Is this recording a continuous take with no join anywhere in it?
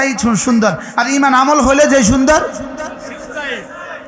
yes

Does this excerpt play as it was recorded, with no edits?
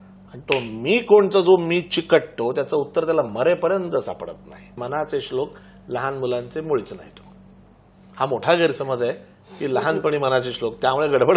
no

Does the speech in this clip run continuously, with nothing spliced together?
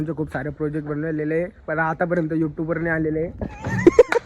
yes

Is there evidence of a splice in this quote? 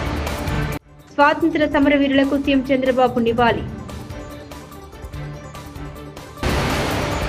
no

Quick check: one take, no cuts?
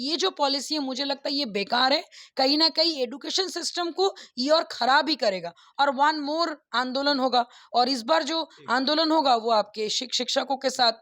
yes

